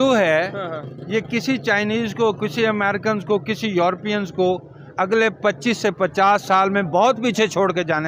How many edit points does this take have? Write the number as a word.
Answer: zero